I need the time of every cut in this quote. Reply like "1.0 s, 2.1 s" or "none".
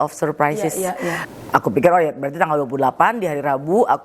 1.1 s